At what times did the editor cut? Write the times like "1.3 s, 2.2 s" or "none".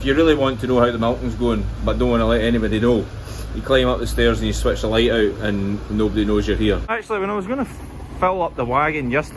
6.8 s